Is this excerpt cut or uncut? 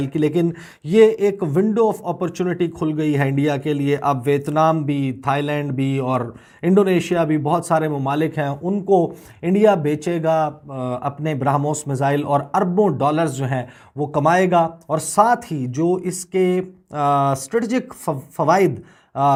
uncut